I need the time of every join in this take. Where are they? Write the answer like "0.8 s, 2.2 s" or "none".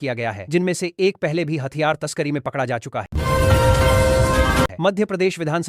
3.1 s, 4.7 s

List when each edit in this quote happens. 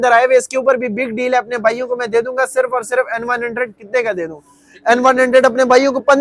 none

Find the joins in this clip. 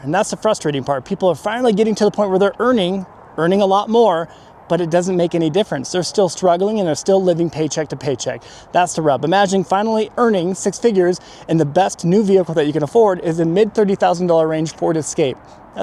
none

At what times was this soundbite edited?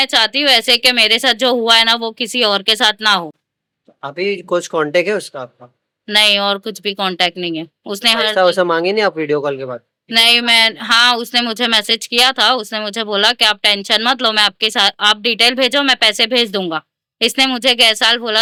none

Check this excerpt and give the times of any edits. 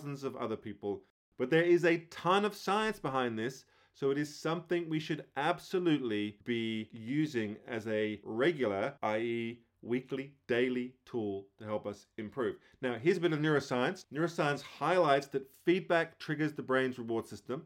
1.2 s

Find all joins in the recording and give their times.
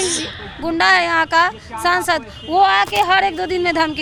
none

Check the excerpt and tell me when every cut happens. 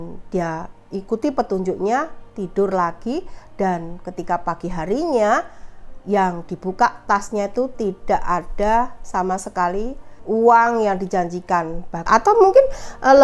10.1 s, 12.0 s

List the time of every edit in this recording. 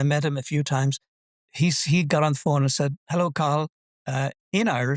1.2 s

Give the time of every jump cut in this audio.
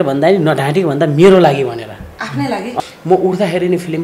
2.8 s

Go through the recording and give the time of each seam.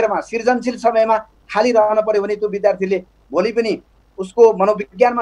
none

